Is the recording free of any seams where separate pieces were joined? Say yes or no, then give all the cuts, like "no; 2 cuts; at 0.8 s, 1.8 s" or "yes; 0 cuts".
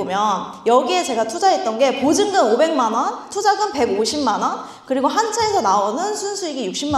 yes; 0 cuts